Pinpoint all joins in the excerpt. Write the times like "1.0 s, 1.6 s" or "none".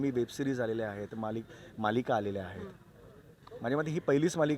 none

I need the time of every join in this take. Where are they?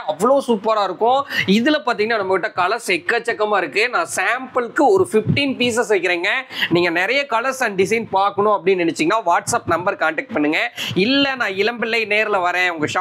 none

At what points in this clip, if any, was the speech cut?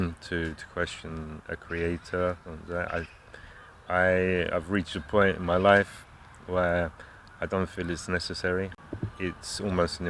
8.7 s

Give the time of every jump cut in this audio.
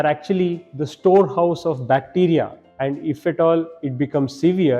2.6 s

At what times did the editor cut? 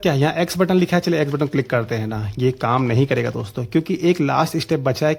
none

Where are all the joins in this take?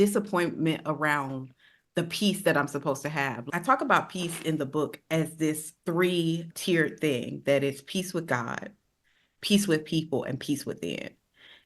3.5 s, 5.7 s

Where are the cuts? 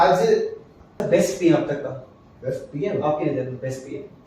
1.0 s

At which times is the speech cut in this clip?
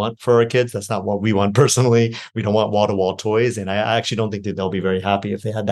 none

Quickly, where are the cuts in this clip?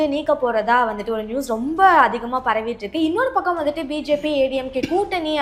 none

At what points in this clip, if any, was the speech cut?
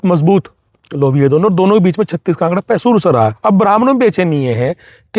3.4 s

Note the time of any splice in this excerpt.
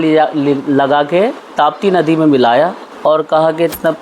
2.8 s

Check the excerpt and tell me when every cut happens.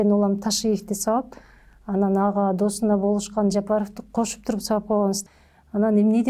5.2 s

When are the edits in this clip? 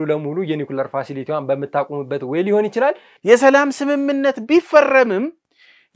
3.1 s

